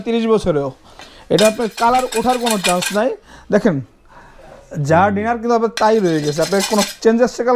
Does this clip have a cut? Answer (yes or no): no